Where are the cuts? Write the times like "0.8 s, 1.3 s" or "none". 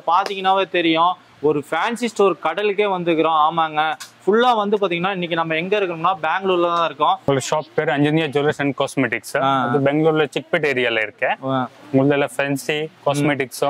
7.3 s